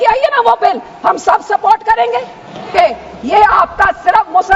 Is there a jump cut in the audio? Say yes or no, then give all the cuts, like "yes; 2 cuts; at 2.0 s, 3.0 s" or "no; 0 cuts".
yes; 1 cut; at 2.7 s